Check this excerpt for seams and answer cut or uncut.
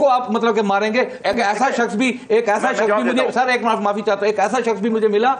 uncut